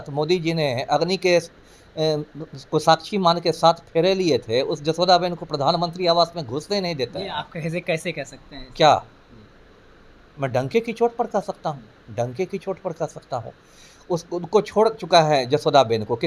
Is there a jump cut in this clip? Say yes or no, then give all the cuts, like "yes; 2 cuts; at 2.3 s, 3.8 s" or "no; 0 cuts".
no; 0 cuts